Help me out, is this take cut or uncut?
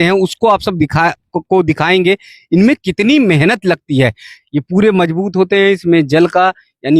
cut